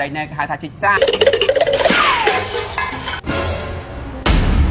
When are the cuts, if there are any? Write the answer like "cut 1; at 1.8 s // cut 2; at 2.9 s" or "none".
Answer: cut 1; at 1.0 s